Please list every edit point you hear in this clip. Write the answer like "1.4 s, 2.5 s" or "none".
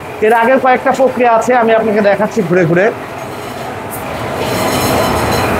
none